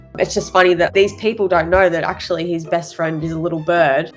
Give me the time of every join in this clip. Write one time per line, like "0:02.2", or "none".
none